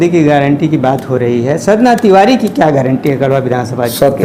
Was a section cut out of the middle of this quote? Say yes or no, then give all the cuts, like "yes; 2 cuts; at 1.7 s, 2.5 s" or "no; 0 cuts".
no; 0 cuts